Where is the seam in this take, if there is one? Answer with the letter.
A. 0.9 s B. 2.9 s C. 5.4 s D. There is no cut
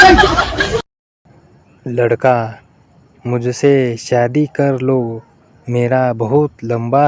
A